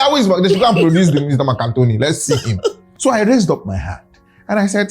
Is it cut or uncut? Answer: cut